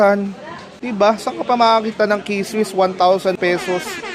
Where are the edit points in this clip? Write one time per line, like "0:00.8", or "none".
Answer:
none